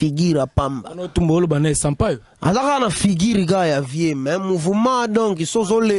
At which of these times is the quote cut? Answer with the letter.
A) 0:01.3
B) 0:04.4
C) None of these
C